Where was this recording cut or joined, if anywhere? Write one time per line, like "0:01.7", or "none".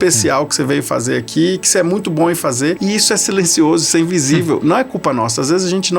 0:02.8